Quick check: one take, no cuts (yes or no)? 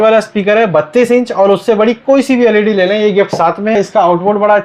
no